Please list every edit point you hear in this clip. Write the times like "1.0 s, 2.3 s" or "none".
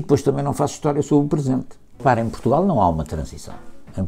1.9 s